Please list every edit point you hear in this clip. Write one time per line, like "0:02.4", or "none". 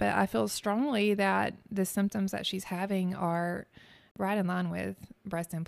0:04.1